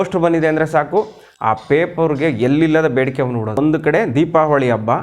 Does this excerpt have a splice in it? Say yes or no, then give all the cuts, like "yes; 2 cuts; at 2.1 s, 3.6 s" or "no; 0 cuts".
yes; 1 cut; at 3.6 s